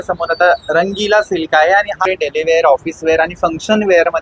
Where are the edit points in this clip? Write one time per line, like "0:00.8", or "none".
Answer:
0:02.0